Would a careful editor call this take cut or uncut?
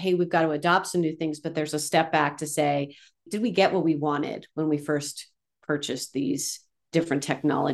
uncut